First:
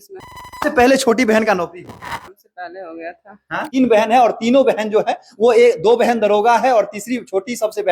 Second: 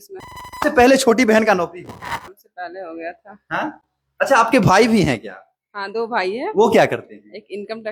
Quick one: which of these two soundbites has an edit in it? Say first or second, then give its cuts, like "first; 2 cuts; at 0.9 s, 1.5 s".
first; 1 cut; at 3.7 s